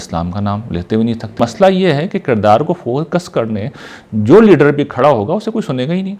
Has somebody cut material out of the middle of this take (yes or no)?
yes